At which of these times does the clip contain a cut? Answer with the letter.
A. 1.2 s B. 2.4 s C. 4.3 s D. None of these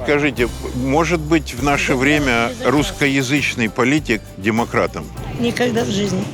D